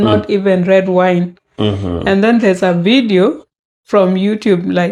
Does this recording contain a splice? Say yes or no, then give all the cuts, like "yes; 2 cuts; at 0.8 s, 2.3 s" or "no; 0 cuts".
no; 0 cuts